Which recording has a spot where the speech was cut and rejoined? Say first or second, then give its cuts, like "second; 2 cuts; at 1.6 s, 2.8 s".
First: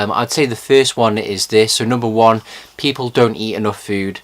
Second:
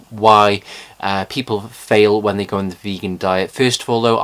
first; 1 cut; at 3.0 s